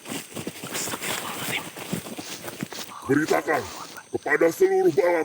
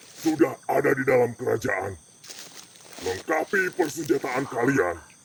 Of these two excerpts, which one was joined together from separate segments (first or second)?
first